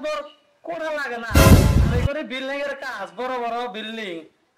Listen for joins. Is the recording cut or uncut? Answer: uncut